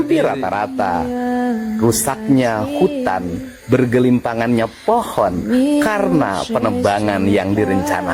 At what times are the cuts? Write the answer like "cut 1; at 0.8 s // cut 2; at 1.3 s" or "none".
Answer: none